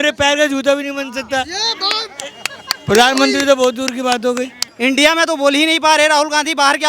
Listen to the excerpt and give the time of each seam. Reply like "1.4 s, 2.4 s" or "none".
4.6 s